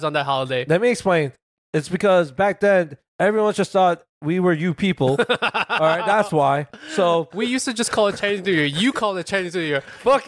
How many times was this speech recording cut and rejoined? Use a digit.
2